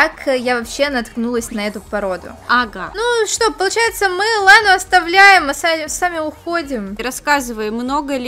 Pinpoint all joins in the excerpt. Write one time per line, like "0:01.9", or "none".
0:02.8
0:07.1